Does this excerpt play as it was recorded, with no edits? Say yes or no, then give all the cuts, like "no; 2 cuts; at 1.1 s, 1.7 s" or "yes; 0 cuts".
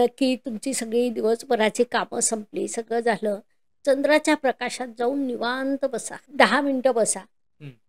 no; 1 cut; at 6.2 s